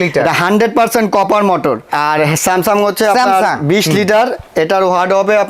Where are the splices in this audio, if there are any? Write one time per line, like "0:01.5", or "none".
0:01.9